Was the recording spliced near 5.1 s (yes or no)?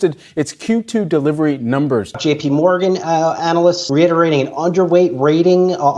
no